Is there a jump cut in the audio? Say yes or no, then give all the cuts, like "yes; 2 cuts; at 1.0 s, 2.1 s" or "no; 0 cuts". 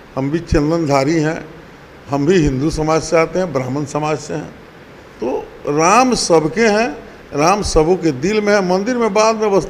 no; 0 cuts